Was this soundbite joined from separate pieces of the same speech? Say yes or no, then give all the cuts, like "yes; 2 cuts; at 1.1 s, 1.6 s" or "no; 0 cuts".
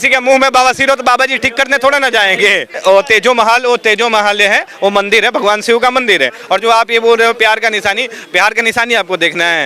yes; 1 cut; at 2.8 s